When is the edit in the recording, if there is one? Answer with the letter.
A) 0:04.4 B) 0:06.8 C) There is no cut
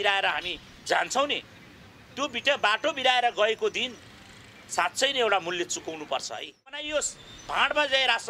B